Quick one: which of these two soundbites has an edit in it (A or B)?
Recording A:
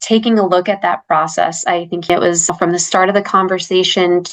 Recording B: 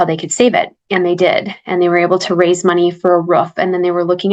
A